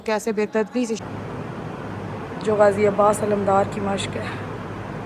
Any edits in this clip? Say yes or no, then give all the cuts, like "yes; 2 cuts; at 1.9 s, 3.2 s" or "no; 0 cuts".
yes; 1 cut; at 1.0 s